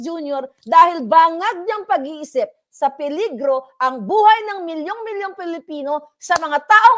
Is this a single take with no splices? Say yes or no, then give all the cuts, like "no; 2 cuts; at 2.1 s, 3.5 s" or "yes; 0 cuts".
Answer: yes; 0 cuts